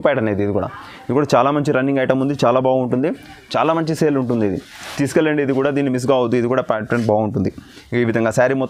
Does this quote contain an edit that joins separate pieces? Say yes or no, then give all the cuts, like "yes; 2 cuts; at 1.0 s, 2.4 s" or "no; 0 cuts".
no; 0 cuts